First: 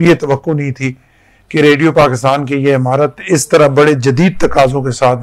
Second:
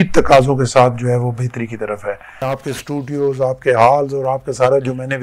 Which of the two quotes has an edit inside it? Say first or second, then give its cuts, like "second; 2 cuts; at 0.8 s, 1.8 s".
second; 1 cut; at 2.6 s